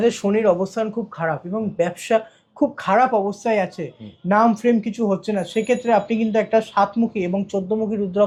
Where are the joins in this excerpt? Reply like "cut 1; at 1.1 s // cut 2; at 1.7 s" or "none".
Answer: none